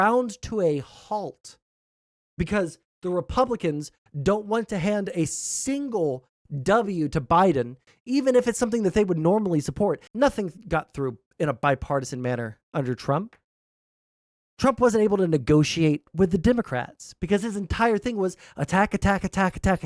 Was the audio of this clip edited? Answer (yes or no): yes